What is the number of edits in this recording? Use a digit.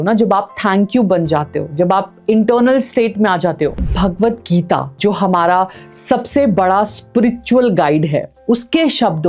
2